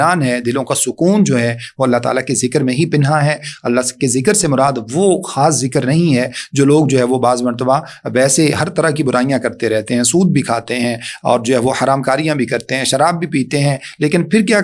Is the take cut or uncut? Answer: uncut